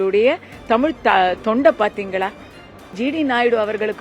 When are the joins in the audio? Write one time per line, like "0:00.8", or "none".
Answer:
0:03.0